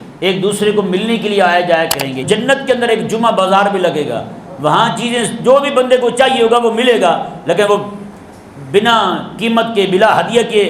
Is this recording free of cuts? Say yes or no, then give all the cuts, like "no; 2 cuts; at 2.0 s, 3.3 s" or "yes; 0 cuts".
no; 1 cut; at 2.2 s